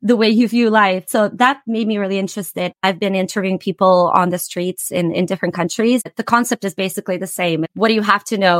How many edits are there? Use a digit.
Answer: 2